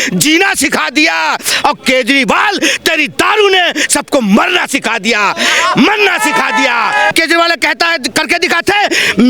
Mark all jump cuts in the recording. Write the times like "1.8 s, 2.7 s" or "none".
7.1 s